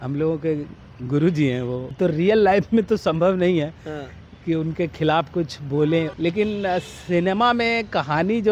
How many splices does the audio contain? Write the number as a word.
two